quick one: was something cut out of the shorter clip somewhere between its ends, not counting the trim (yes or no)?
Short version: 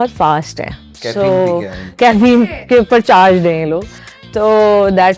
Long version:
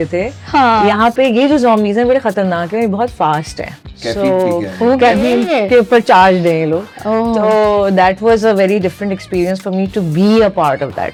no